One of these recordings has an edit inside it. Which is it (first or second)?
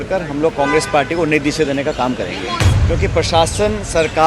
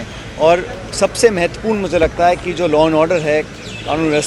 first